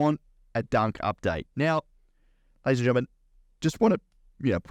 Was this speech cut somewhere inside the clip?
no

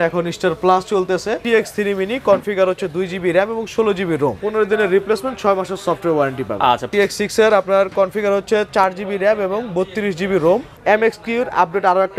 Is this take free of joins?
no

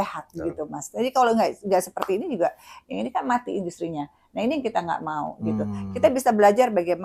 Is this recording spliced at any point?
no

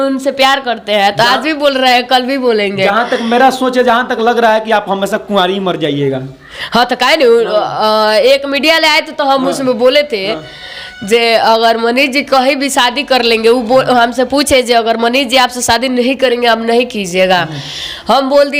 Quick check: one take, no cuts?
yes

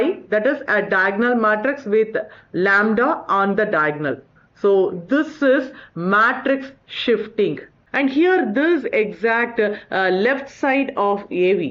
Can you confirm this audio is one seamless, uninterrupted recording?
no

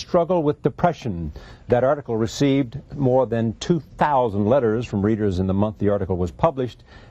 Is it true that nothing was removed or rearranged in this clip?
no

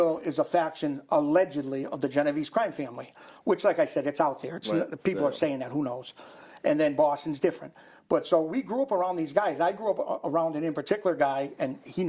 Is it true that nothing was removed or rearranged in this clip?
yes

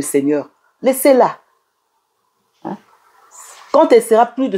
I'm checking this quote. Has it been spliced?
no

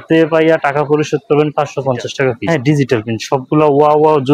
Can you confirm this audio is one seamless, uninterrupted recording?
no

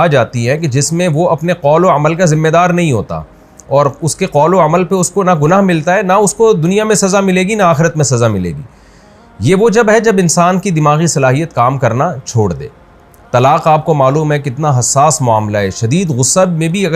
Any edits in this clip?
no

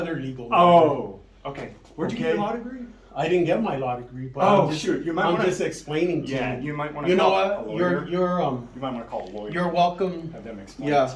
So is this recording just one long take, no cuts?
yes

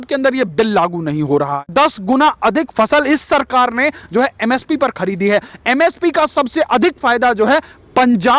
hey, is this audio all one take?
no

